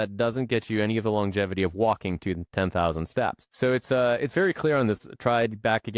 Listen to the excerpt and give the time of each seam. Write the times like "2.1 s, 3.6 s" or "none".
3.4 s, 5.0 s